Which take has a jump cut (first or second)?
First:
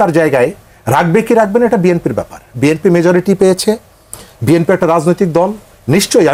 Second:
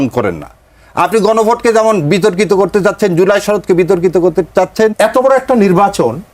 second